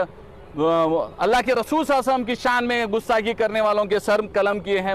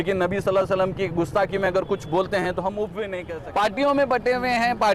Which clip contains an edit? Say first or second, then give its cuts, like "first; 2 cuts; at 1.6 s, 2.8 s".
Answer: second; 1 cut; at 3.2 s